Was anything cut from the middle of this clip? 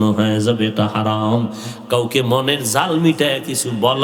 no; 0 cuts

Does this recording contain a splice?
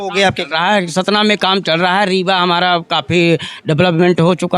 no; 0 cuts

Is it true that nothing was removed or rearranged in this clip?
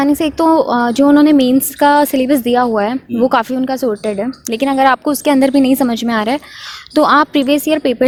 yes; 0 cuts

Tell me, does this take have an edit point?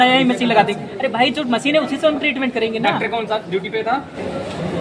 no; 0 cuts

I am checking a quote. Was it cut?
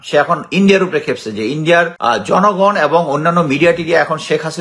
yes; 1 cut; at 1.9 s

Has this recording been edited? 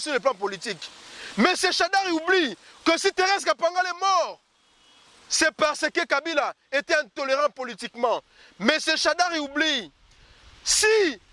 no; 0 cuts

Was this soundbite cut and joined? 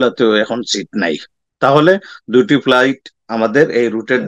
no; 0 cuts

